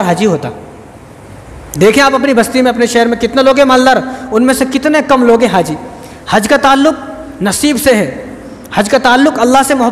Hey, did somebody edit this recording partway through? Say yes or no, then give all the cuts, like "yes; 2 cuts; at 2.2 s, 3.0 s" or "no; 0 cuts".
no; 0 cuts